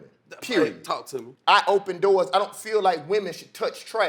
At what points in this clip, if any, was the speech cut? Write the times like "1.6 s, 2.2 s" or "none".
1.3 s

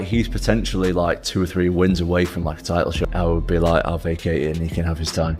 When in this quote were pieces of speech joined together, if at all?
3.0 s

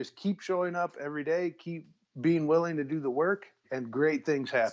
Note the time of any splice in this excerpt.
none

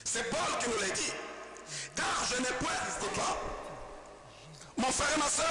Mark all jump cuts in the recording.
2.9 s

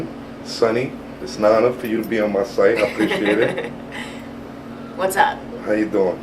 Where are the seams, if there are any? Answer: none

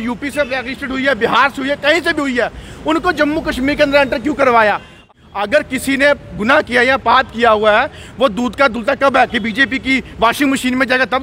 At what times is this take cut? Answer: 5.0 s

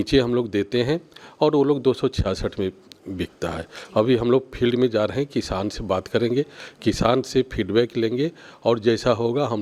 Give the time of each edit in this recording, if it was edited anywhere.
none

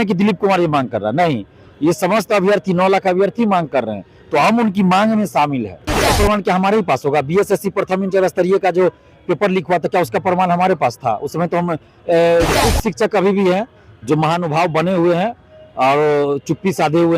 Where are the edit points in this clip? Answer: 6.1 s, 12.6 s

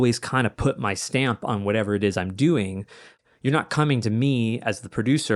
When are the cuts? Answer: 3.2 s

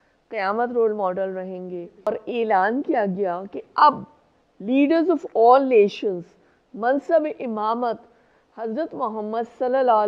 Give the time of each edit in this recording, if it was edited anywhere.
2.1 s

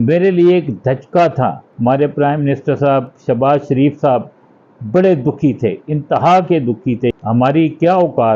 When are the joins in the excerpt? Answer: 1.7 s, 7.1 s

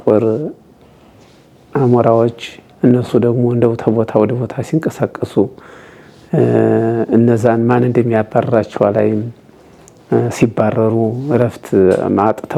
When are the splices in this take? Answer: none

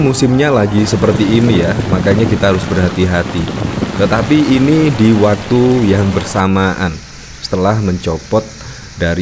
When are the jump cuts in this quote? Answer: none

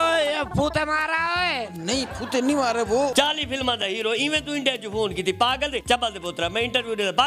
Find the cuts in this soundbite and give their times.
3.1 s, 5.8 s

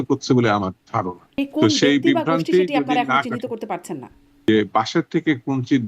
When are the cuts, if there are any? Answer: 1.2 s, 4.5 s

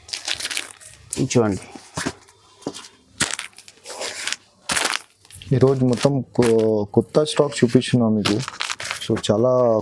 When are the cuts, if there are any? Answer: none

